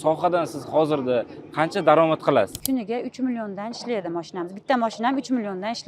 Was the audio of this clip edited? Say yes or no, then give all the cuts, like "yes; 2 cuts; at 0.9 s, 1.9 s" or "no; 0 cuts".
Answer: yes; 1 cut; at 2.6 s